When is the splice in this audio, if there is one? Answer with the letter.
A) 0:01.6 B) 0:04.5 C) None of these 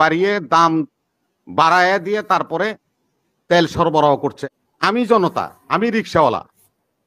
B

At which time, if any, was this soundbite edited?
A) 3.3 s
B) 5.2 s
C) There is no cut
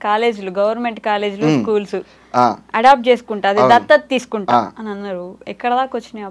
C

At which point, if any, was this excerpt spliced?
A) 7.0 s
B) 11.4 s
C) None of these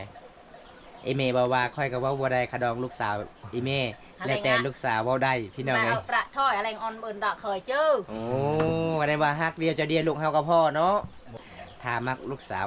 B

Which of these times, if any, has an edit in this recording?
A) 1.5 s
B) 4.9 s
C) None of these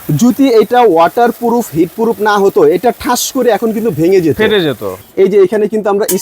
B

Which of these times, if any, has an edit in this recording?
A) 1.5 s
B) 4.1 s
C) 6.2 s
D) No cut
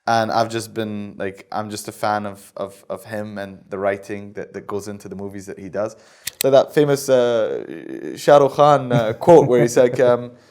C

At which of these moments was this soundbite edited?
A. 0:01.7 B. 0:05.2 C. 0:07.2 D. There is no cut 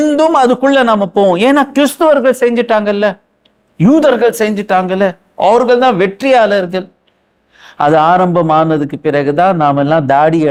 D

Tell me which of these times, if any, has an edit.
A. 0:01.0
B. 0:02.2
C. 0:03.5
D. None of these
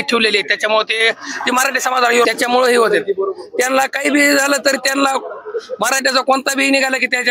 B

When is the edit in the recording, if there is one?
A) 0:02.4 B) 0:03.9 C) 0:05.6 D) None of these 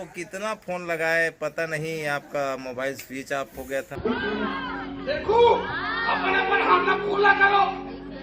B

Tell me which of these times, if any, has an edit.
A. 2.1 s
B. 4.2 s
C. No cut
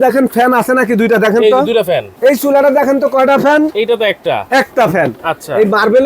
A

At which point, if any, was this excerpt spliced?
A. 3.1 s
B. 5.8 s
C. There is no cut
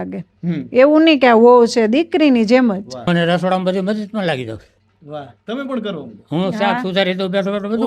A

